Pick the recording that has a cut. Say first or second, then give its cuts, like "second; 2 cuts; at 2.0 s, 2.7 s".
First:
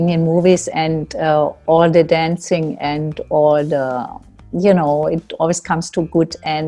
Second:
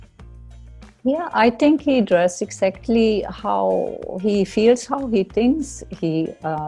second; 1 cut; at 1.0 s